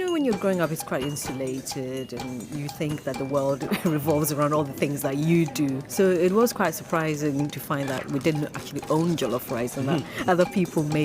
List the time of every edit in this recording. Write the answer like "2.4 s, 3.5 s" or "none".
5.8 s, 7.5 s